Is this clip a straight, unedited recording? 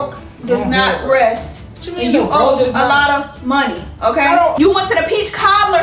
no; 1 cut; at 4.5 s

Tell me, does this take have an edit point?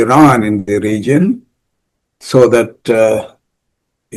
no; 0 cuts

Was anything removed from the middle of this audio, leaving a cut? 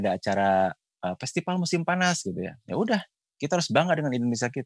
no; 0 cuts

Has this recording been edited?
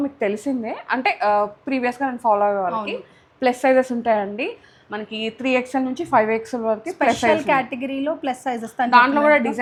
no; 0 cuts

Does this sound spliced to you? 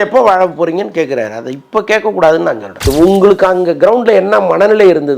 yes; 1 cut; at 2.9 s

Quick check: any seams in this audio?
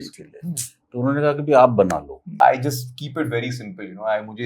yes; 1 cut; at 2.4 s

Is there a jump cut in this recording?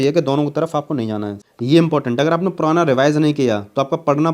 yes; 1 cut; at 1.4 s

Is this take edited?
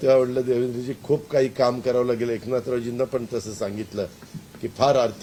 no; 0 cuts

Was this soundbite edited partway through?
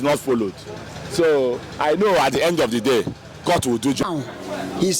yes; 1 cut; at 4.0 s

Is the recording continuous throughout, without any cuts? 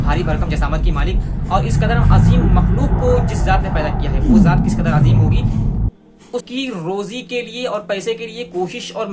no; 1 cut; at 6.5 s

